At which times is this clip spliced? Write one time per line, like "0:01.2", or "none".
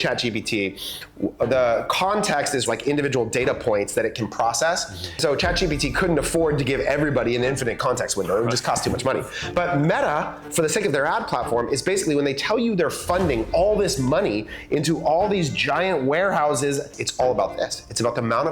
0:02.6
0:05.2
0:17.0